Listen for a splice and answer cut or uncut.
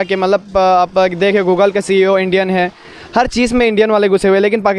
uncut